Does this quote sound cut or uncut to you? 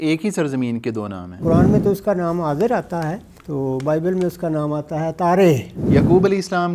cut